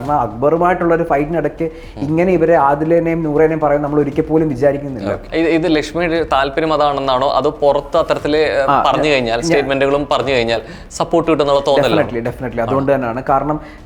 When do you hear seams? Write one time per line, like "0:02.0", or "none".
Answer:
0:05.2